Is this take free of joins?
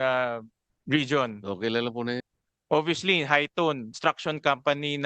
no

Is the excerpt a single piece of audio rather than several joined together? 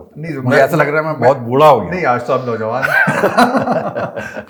yes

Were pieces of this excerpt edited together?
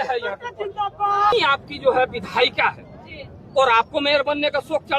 yes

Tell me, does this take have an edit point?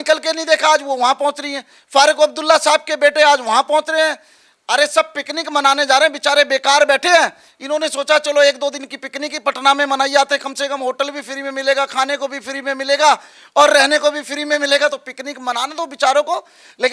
no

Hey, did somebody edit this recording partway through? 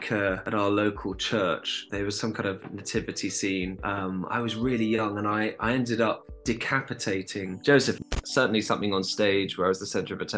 yes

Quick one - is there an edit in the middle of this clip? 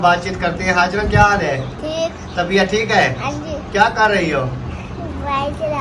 no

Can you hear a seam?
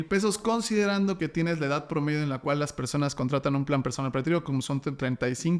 no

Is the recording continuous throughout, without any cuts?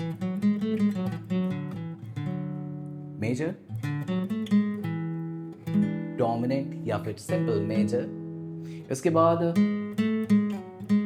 yes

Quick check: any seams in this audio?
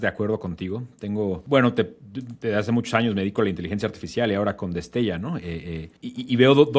no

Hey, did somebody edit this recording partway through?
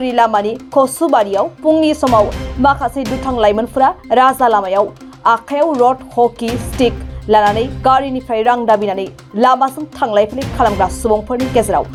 no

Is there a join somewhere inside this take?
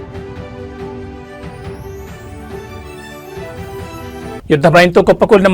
yes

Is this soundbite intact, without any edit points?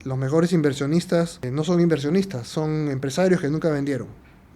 no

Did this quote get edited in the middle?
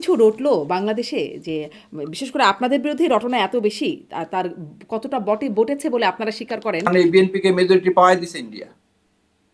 yes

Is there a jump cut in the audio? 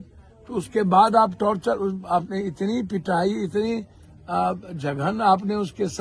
no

